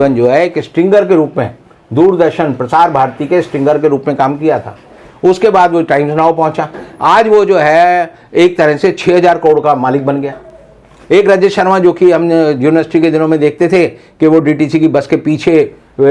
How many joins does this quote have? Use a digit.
0